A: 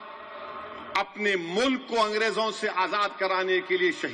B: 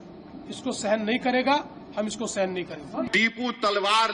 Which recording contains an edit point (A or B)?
B